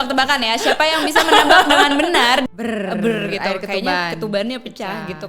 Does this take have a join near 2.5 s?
yes; 1 cut; at 2.5 s

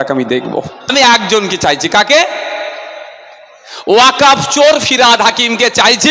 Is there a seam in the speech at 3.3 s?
no; 1 cut; at 0.9 s

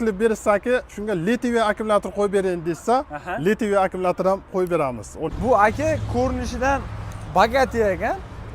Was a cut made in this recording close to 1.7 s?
no; 1 cut; at 5.3 s

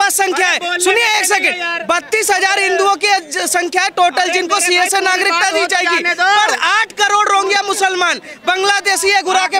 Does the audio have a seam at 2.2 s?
no; 0 cuts

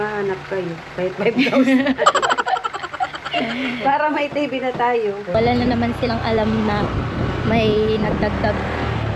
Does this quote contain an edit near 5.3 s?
yes; 1 cut; at 5.3 s

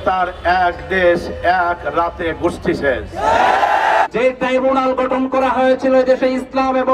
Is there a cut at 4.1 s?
yes; 1 cut; at 4.1 s

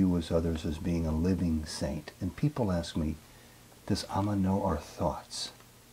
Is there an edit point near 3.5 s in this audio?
no; 0 cuts

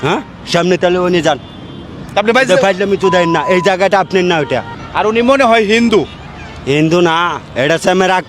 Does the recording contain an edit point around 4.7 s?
yes; 1 cut; at 4.7 s

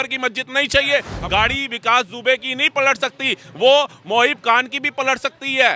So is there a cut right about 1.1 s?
yes; 1 cut; at 1.1 s

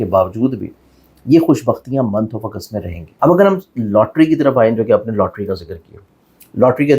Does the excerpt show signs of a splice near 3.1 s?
yes; 1 cut; at 3.1 s

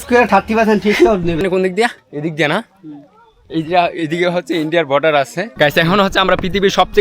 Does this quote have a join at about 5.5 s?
yes; 2 cuts; at 1.4 s, 5.5 s

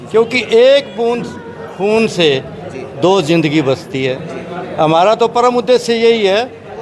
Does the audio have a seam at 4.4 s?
no; 0 cuts

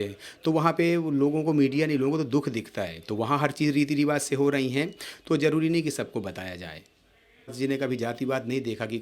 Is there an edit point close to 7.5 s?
yes; 1 cut; at 7.5 s

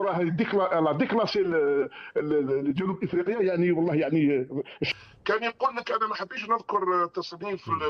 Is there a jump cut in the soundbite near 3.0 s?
no; 1 cut; at 4.8 s

